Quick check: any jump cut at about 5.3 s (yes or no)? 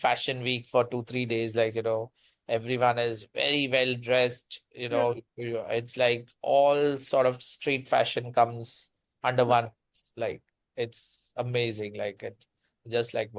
no